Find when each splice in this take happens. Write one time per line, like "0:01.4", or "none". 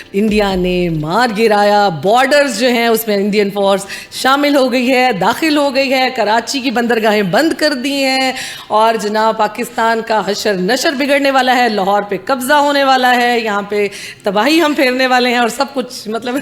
none